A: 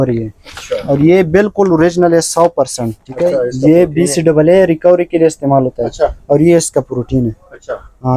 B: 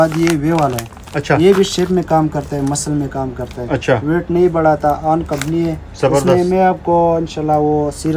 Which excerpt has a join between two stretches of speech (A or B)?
A